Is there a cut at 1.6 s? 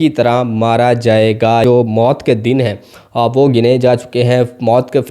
yes; 1 cut; at 1.6 s

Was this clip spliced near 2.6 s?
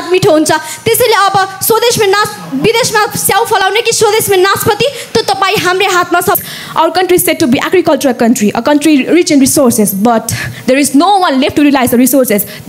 no; 1 cut; at 6.4 s

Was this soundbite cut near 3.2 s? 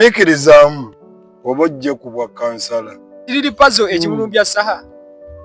yes; 1 cut; at 3.2 s

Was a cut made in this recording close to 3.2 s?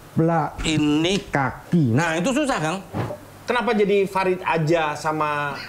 yes; 1 cut; at 3.2 s

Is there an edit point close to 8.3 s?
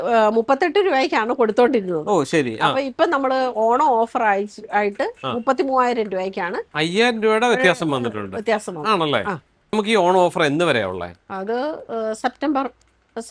no; 0 cuts

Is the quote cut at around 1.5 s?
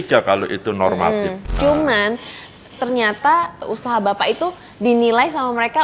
yes; 2 cuts; at 1.5 s, 3.6 s

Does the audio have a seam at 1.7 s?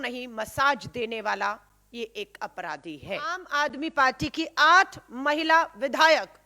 no; 1 cut; at 3.4 s

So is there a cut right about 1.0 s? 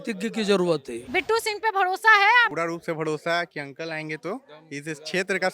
yes; 2 cuts; at 1.0 s, 2.5 s

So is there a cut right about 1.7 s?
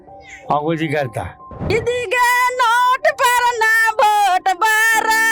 yes; 1 cut; at 1.7 s

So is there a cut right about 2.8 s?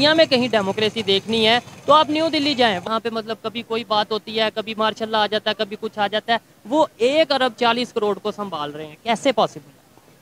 yes; 1 cut; at 2.8 s

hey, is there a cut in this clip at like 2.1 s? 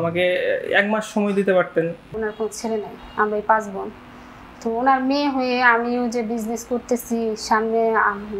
yes; 1 cut; at 2.1 s

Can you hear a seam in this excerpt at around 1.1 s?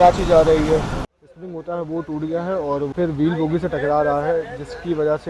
yes; 2 cuts; at 1.1 s, 2.9 s

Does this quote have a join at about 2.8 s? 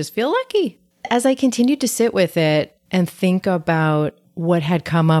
no; 2 cuts; at 1.1 s, 4.3 s

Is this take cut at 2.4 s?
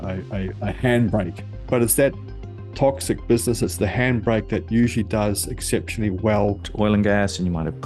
no; 1 cut; at 6.7 s

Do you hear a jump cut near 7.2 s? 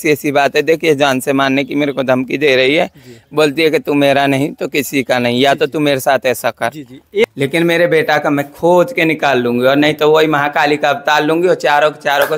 yes; 1 cut; at 7.2 s

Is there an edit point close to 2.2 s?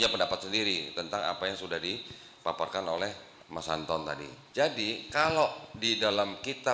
no; 1 cut; at 4.3 s

